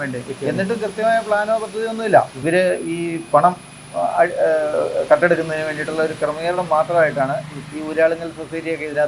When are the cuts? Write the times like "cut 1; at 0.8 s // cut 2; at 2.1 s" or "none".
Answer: cut 1; at 2.4 s